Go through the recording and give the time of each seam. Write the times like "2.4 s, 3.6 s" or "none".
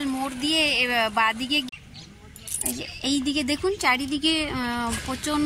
1.7 s